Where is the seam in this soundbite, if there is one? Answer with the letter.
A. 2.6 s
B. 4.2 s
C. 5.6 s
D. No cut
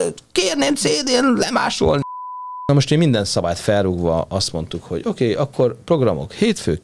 A